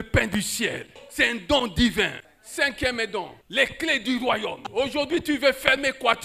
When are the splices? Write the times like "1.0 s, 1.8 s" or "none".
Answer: 1.0 s, 2.2 s, 3.4 s, 4.7 s